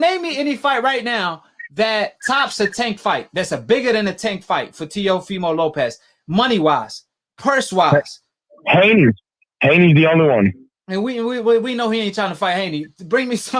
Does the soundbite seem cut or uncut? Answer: uncut